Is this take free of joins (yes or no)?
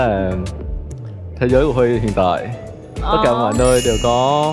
yes